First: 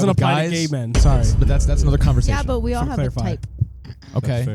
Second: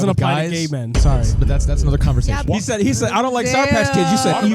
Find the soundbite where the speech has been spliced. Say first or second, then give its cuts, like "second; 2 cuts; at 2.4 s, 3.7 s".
second; 1 cut; at 2.4 s